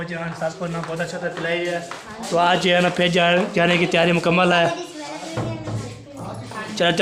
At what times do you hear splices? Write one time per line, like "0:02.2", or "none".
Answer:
none